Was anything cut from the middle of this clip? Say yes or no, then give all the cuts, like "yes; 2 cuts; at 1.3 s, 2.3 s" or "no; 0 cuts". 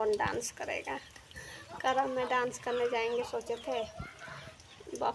no; 0 cuts